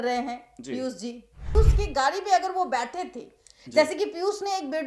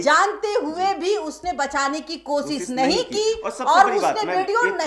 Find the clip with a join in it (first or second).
first